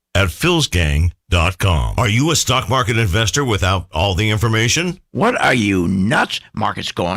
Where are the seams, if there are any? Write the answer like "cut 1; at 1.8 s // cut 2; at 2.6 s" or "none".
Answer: cut 1; at 1.9 s